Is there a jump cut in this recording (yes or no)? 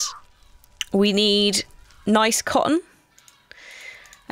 yes